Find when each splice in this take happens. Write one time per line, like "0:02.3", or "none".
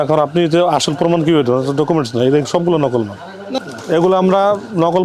0:03.6